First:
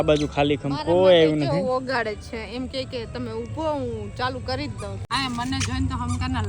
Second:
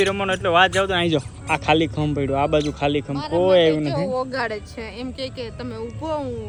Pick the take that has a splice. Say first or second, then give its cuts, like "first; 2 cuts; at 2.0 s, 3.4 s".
first; 1 cut; at 5.0 s